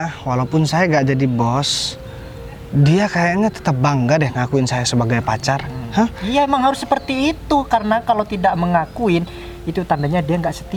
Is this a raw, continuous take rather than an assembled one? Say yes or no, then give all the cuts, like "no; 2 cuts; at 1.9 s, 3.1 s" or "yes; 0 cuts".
yes; 0 cuts